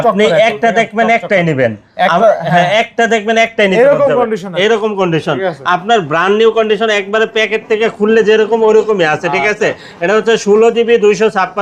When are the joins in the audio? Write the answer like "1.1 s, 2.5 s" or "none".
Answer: none